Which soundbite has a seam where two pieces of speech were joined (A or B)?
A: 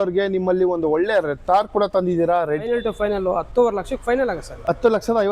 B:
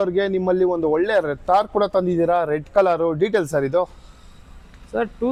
A